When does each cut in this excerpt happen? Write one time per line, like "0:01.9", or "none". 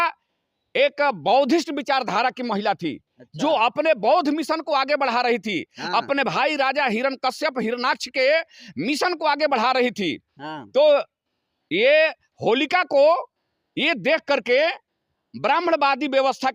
none